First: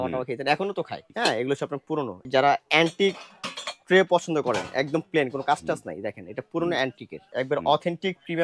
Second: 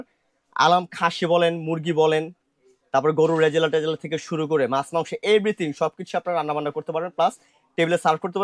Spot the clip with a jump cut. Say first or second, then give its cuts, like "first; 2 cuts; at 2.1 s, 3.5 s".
first; 3 cuts; at 1.1 s, 2.2 s, 7.1 s